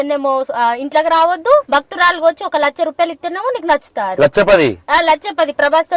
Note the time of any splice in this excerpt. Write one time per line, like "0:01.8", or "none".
0:01.7